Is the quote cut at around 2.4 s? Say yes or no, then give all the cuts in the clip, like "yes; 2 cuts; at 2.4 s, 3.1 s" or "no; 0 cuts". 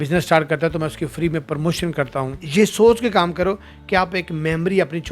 yes; 1 cut; at 2.4 s